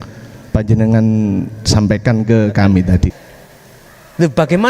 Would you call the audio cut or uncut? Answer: cut